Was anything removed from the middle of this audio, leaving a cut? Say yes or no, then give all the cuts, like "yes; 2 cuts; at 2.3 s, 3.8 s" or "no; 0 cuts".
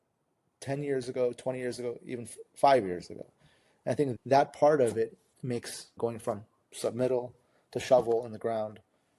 yes; 1 cut; at 4.1 s